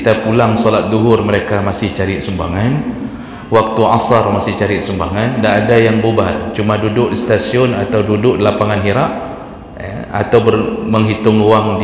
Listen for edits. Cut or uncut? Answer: uncut